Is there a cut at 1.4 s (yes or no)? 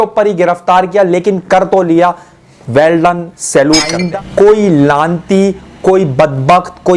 no